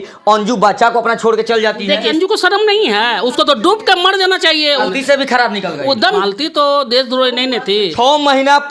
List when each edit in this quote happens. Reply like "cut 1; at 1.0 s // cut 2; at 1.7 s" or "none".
cut 1; at 2.1 s // cut 2; at 4.9 s // cut 3; at 6.2 s // cut 4; at 7.9 s